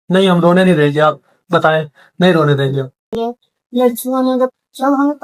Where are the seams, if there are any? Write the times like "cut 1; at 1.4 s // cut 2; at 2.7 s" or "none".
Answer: cut 1; at 3.1 s